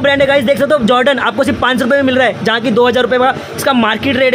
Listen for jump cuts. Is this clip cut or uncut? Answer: uncut